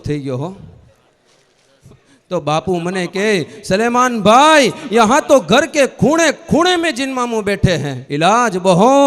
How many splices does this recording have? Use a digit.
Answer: 2